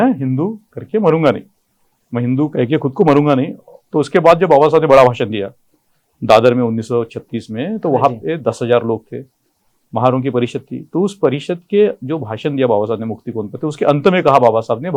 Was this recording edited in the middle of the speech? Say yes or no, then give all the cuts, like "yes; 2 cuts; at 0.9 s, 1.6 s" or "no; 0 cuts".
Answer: no; 0 cuts